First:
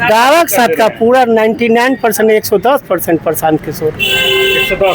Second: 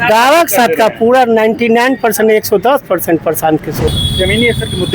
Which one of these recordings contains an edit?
second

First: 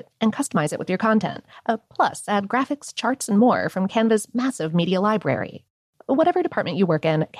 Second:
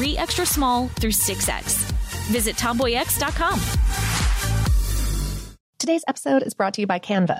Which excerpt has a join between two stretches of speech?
second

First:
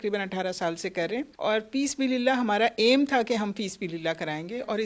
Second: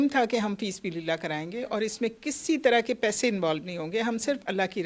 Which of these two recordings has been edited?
first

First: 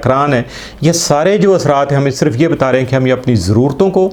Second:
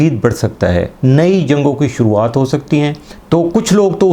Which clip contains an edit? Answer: second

